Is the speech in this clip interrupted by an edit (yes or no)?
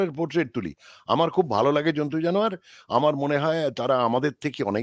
no